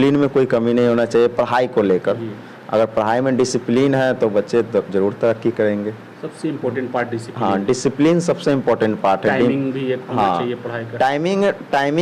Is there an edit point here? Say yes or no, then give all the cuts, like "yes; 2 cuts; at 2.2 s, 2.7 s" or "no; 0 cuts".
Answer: no; 0 cuts